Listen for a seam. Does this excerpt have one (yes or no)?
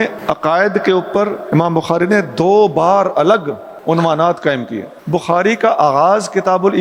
no